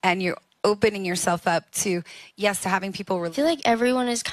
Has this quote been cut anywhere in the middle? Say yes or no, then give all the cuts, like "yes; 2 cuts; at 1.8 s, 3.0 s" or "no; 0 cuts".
yes; 1 cut; at 3.3 s